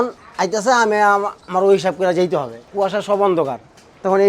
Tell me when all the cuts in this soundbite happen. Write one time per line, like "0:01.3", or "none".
0:02.6